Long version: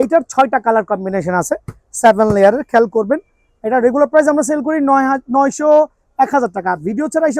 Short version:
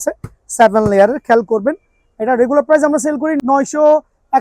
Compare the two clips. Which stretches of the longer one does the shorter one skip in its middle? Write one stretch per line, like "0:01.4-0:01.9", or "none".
0:04.8-0:05.2

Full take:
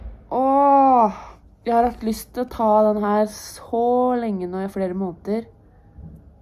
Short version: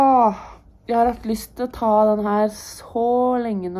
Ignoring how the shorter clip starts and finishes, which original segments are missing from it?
none

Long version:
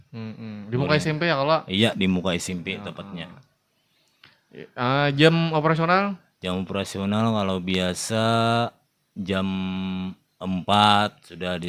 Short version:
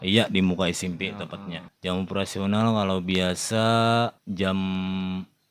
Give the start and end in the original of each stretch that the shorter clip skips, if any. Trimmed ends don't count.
0:03.4-0:06.3
0:08.8-0:09.1

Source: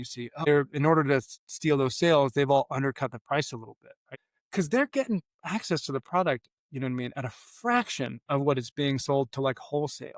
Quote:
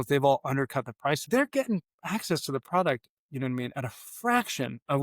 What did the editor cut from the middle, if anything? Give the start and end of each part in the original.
0:03.5-0:04.7

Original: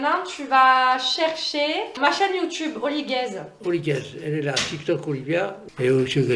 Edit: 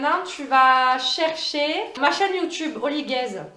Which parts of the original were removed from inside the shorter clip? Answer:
none

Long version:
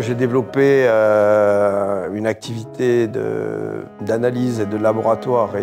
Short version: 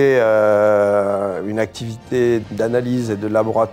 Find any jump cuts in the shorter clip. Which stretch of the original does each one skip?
0:03.1-0:04.0

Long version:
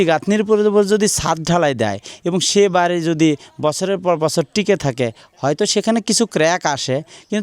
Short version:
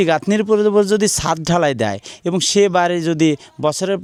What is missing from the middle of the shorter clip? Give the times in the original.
none

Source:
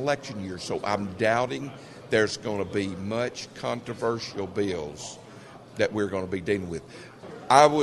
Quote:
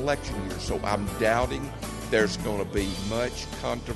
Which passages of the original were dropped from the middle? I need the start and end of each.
none

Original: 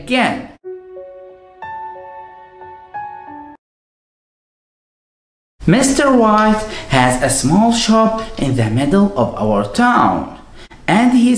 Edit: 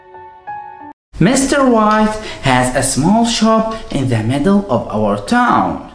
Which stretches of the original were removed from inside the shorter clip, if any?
0:03.4-0:05.4

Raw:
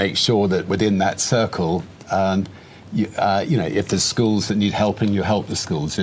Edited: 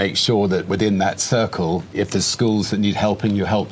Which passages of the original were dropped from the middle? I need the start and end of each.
0:01.9-0:03.7

